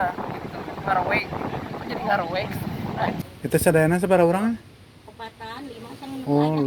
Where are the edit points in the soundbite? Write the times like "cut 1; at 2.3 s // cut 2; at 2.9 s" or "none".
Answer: cut 1; at 3.3 s